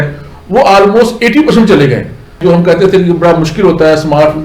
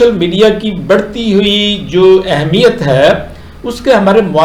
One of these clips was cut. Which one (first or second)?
first